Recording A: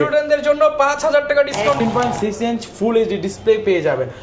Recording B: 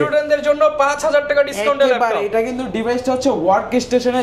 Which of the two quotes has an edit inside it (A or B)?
A